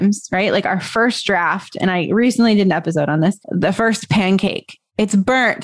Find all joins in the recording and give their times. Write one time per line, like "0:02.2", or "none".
none